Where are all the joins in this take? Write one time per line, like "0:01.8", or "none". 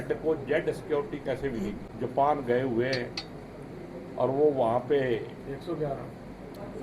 0:01.8